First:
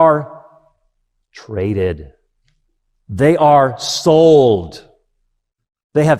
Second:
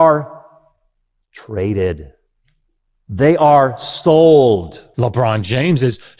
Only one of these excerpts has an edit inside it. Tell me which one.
second; 1 cut; at 4.8 s

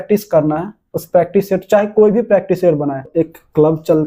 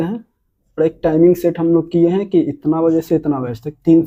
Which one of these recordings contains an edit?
first; 1 cut; at 3.1 s

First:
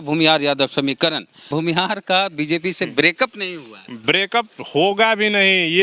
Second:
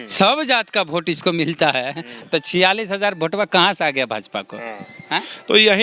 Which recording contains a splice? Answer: first; 1 cut; at 1.4 s

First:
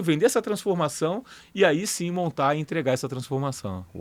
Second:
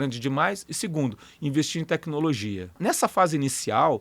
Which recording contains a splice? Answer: second; 1 cut; at 2.8 s

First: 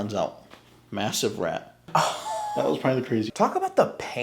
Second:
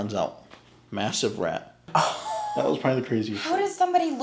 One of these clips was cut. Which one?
first; 1 cut; at 3.3 s

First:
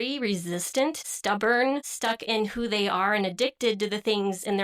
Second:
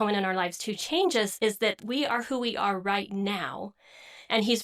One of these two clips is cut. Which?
first; 2 cuts; at 1.1 s, 1.9 s

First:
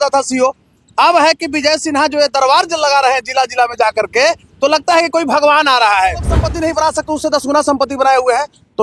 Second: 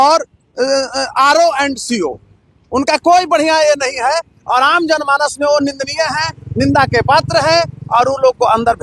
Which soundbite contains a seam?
first; 1 cut; at 6.4 s

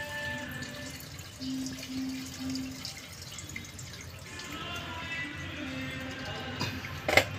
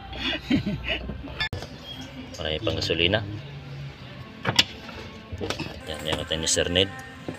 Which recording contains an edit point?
second; 1 cut; at 1.5 s

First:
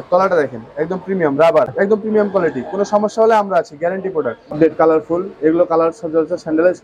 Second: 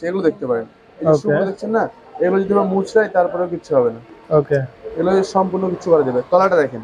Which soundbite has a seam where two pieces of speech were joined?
first; 2 cuts; at 1.7 s, 4.5 s

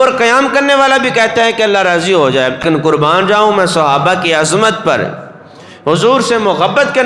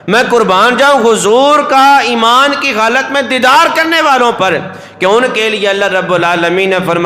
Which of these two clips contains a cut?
first; 1 cut; at 2.6 s

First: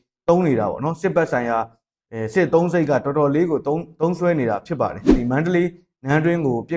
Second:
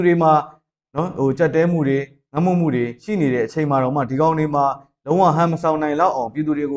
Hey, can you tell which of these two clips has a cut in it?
first; 1 cut; at 5.2 s

